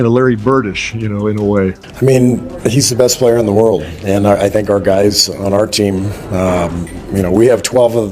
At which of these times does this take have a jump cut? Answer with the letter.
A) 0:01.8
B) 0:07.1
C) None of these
A